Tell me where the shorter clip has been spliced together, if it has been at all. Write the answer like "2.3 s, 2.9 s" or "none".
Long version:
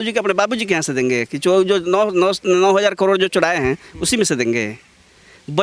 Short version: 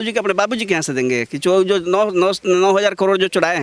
none